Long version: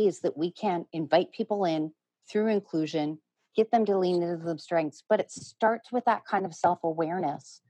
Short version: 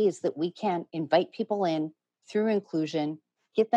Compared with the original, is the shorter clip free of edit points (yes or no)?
yes